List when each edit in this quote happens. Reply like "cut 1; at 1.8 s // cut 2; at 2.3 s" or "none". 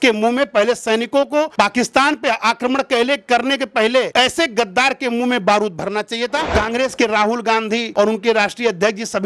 cut 1; at 6.5 s // cut 2; at 7.9 s